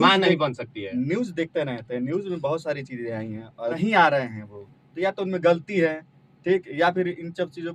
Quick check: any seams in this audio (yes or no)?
yes